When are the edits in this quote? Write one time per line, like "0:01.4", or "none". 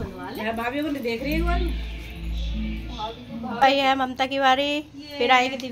0:03.6